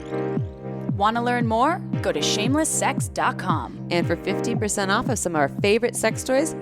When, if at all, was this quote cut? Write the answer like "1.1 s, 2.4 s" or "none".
1.0 s